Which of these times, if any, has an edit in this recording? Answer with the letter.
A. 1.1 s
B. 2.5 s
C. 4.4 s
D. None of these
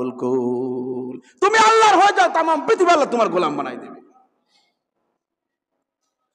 D